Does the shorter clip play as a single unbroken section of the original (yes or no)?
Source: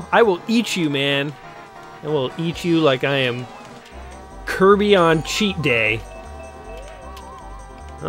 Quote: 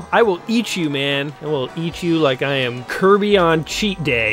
no